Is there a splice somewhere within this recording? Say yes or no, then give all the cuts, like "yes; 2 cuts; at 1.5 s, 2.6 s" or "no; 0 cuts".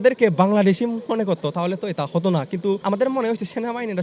yes; 2 cuts; at 1.0 s, 2.8 s